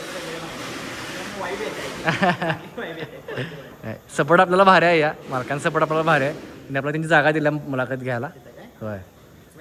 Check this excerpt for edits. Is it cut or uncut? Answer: uncut